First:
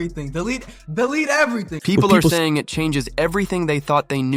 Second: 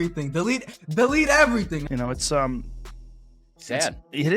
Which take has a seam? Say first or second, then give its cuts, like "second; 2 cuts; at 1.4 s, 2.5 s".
second; 1 cut; at 1.7 s